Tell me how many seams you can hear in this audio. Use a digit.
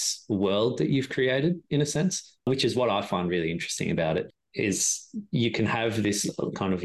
0